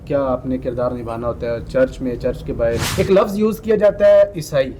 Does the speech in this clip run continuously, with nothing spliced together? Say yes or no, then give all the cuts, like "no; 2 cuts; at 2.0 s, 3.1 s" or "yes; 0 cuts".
no; 1 cut; at 2.9 s